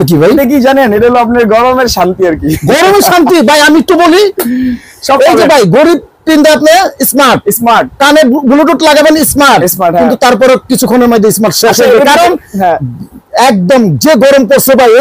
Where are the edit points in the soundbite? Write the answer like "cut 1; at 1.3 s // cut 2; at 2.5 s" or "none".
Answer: none